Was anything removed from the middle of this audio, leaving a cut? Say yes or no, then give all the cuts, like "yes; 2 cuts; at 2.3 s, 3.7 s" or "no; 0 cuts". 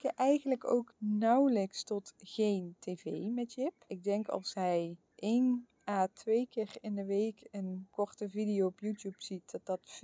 yes; 5 cuts; at 0.9 s, 3.9 s, 5.0 s, 5.7 s, 7.8 s